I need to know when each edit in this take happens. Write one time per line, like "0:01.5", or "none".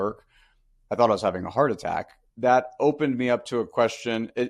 0:02.2